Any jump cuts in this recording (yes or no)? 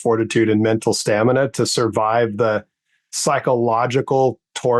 no